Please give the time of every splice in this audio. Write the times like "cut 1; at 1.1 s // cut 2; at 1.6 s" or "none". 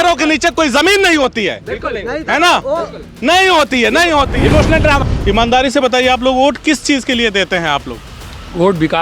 cut 1; at 5.1 s